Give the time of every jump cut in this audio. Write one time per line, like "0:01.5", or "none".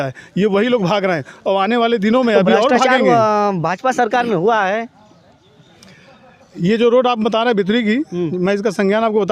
0:02.9